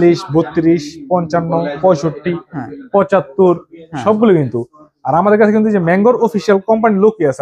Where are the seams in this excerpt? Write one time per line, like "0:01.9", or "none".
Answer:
none